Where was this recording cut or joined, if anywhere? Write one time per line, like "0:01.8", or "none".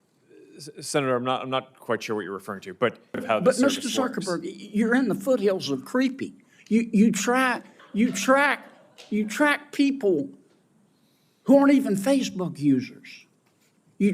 0:03.2